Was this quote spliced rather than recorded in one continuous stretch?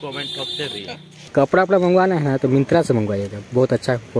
yes; 1 cut; at 1.2 s

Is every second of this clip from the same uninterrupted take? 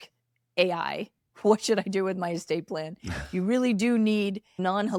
yes; 0 cuts

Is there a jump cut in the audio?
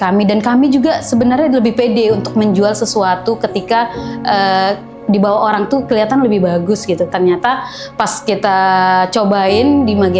yes; 1 cut; at 7.1 s

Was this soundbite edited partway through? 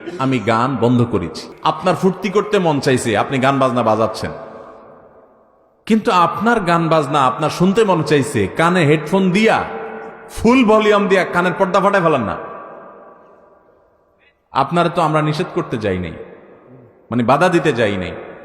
yes; 1 cut; at 1.4 s

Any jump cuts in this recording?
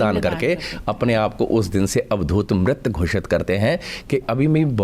no; 0 cuts

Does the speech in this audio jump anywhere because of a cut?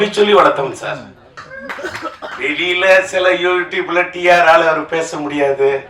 yes; 1 cut; at 1.5 s

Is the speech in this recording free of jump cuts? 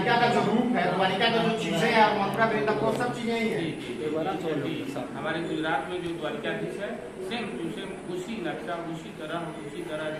yes; 0 cuts

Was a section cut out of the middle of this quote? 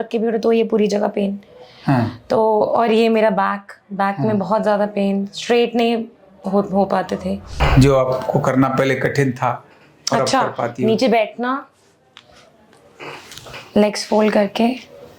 yes; 1 cut; at 7.6 s

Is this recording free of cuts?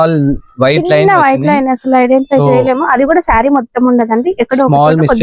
yes; 0 cuts

